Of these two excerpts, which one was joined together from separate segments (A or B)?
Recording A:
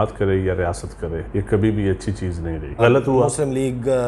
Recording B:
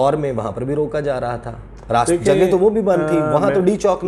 A